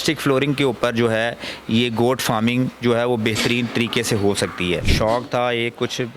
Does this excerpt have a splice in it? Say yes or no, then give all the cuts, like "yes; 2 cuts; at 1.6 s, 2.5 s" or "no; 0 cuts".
yes; 1 cut; at 4.9 s